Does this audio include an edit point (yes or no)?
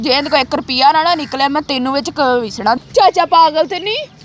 yes